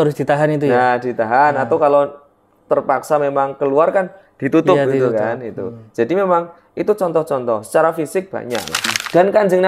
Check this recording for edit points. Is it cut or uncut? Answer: cut